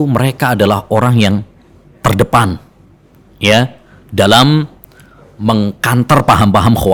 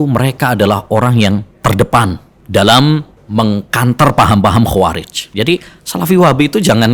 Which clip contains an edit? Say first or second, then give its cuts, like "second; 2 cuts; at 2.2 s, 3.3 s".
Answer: second; 4 cuts; at 1.5 s, 2.3 s, 3.2 s, 5.2 s